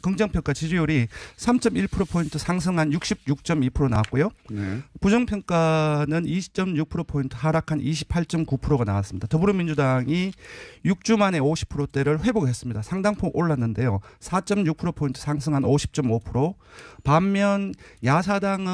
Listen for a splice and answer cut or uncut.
uncut